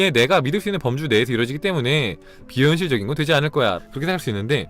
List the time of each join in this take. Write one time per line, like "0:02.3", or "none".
0:03.8